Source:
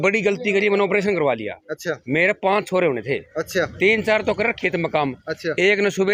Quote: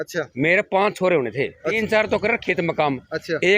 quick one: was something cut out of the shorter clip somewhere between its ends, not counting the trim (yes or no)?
yes